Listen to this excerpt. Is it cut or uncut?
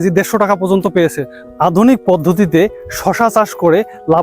cut